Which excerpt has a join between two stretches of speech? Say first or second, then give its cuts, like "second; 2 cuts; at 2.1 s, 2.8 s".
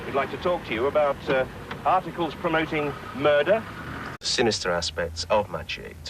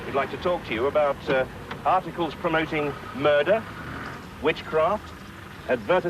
second; 1 cut; at 4.2 s